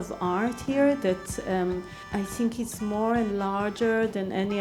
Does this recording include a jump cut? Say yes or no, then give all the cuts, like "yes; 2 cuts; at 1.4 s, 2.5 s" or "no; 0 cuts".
yes; 1 cut; at 2.0 s